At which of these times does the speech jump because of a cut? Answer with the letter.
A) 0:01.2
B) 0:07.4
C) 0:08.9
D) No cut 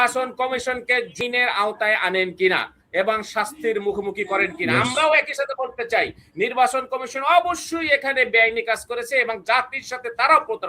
A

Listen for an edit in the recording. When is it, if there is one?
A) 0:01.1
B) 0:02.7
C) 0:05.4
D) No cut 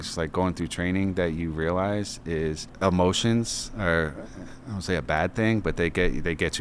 B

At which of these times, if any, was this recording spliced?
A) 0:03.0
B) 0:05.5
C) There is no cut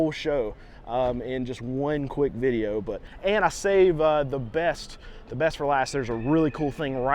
A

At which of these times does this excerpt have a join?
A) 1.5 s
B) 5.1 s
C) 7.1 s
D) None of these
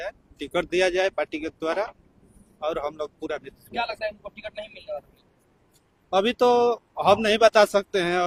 D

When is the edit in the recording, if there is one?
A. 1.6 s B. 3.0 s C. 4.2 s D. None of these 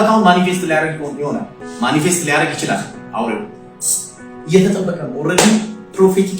A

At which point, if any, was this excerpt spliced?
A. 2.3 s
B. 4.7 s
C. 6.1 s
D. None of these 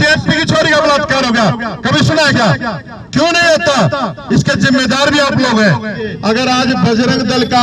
C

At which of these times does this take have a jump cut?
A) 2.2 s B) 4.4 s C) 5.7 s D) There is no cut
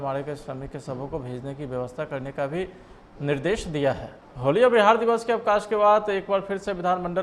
B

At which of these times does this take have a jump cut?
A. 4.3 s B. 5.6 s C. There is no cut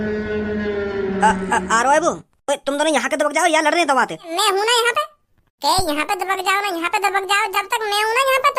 A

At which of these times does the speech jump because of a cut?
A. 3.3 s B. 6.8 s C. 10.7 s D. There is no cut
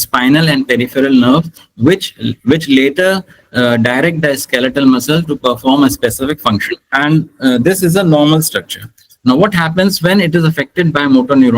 B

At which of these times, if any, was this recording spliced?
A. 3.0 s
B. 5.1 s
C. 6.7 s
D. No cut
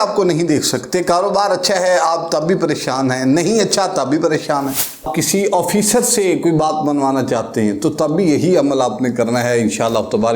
B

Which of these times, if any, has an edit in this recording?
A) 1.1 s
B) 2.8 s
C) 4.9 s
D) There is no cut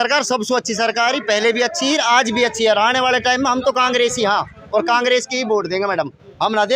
D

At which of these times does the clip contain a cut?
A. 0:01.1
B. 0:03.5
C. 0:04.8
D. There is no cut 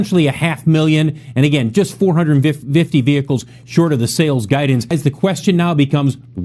C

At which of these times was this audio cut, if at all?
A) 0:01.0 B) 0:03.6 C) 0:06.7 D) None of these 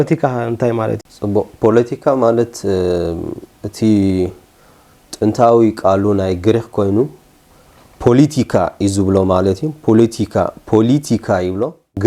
A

